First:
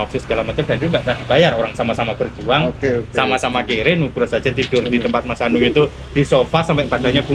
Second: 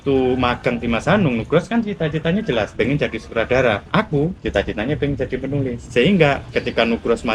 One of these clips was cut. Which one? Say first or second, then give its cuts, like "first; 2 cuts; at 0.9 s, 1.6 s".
second; 3 cuts; at 2.7 s, 4.1 s, 5.8 s